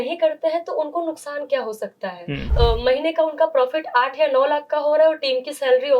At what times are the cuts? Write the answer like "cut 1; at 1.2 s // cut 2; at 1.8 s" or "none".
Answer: cut 1; at 2.4 s